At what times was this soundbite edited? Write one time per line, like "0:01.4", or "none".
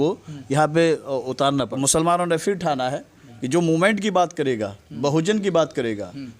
0:01.6